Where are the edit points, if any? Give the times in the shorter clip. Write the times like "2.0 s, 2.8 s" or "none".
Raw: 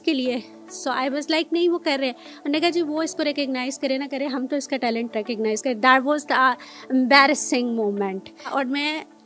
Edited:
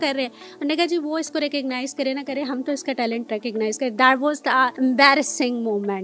4.7 s